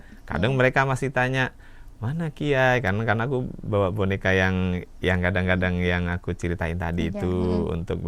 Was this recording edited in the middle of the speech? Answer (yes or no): no